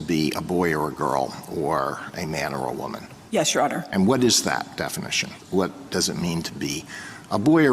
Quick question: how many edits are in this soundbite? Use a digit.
2